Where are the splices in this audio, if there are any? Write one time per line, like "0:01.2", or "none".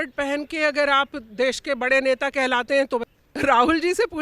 0:03.1